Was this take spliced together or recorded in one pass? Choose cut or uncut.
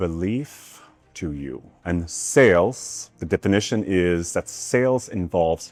uncut